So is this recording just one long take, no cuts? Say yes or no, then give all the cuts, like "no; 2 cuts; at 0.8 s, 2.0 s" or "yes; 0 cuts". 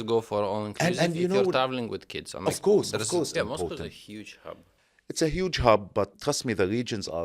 no; 2 cuts; at 3.3 s, 6.2 s